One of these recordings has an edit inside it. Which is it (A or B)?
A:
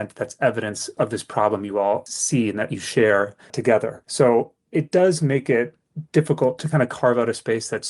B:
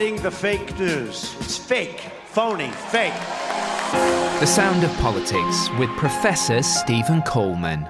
A